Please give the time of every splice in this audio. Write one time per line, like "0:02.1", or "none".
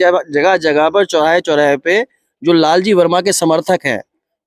none

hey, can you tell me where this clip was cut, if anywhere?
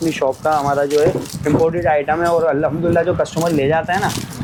none

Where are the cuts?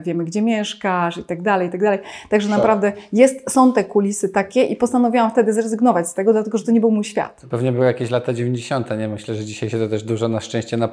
none

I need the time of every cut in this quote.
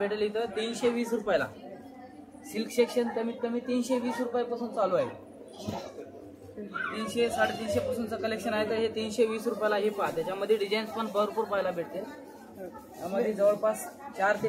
none

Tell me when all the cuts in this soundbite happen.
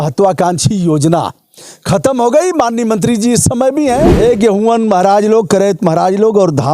0:04.1

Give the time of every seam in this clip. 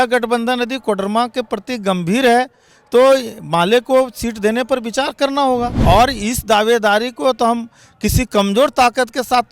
0:05.7

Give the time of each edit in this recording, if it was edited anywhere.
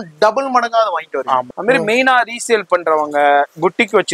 0:01.5

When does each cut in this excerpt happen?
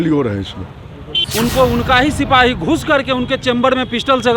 0:01.2

